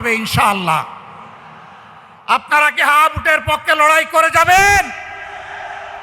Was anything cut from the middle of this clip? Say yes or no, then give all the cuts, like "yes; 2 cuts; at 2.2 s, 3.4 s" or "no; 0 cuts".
no; 0 cuts